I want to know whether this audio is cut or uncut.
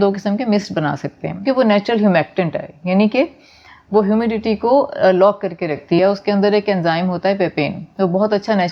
cut